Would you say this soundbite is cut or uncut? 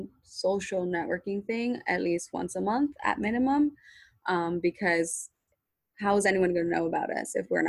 uncut